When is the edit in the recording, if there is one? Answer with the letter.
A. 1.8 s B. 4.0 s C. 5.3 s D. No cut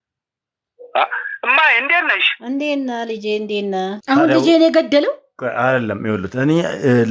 B